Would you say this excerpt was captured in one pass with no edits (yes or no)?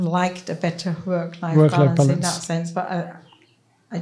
yes